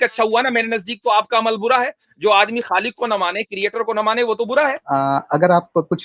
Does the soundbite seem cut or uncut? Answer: cut